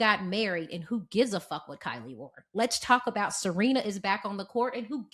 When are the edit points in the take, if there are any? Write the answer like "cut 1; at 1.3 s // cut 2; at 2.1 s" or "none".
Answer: none